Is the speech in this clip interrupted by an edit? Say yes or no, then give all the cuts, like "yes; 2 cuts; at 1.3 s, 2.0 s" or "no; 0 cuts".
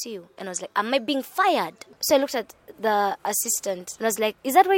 yes; 2 cuts; at 1.9 s, 3.9 s